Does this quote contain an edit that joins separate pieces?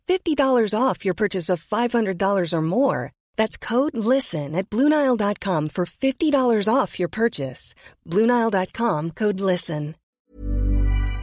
yes; 1 cut; at 10.3 s

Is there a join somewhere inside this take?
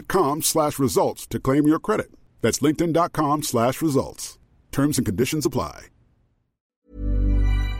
yes; 1 cut; at 6.7 s

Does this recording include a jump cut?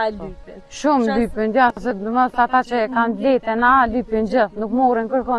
no; 0 cuts

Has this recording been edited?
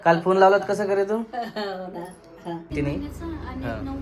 yes; 1 cut; at 2.7 s

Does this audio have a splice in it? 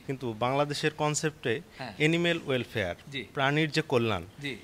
no; 0 cuts

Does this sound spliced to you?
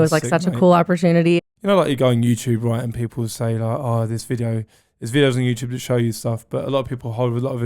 yes; 1 cut; at 1.4 s

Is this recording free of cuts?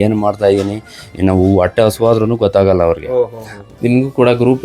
no; 1 cut; at 3.7 s

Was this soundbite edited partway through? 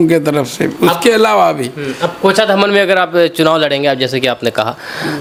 no; 0 cuts

